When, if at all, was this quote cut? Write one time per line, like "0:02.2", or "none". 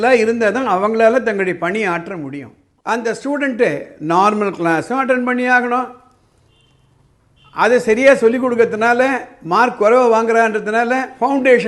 0:02.7